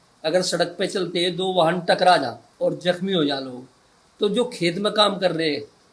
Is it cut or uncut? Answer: cut